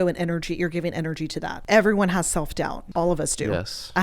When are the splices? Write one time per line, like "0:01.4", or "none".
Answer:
0:01.6
0:02.8